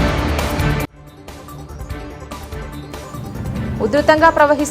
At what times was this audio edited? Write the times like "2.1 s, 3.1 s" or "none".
2.9 s